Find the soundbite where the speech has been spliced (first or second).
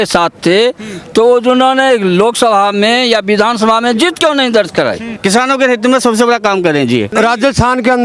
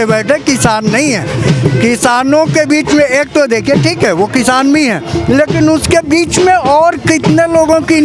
first